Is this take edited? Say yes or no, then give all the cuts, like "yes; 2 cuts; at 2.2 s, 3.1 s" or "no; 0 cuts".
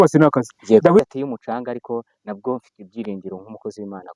yes; 1 cut; at 1.1 s